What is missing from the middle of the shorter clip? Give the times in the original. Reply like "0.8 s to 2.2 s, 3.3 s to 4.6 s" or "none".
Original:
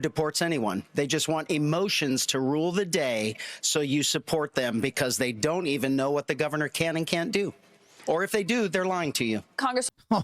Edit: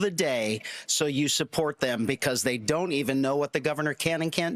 none